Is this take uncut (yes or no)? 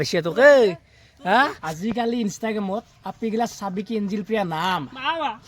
no